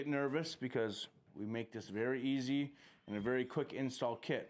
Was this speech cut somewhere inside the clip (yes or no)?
yes